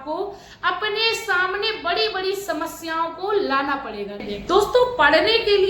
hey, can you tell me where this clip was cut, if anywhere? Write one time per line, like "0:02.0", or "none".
0:04.2